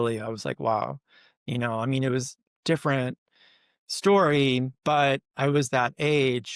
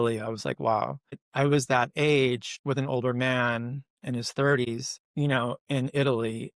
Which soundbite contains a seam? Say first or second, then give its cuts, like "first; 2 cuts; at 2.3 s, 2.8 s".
second; 3 cuts; at 1.3 s, 2.5 s, 4.7 s